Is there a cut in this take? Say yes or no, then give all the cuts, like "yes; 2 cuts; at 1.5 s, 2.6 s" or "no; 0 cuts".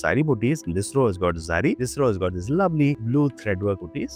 no; 0 cuts